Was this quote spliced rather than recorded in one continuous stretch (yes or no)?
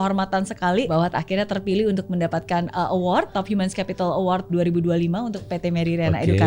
yes